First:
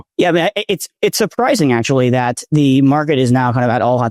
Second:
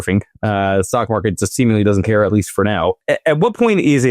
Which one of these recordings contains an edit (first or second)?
second